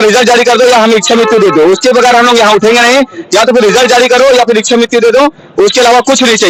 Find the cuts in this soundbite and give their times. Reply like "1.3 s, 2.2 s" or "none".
none